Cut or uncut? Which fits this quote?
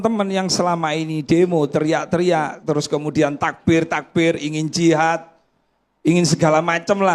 cut